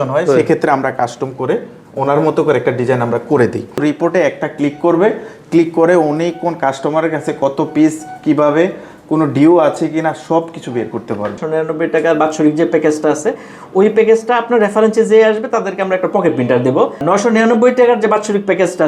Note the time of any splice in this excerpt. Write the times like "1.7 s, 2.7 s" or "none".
3.8 s, 11.3 s, 17.0 s